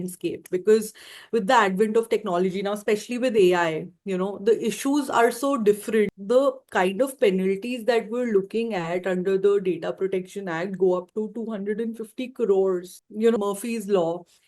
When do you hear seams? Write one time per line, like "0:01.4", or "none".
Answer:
0:06.2
0:13.4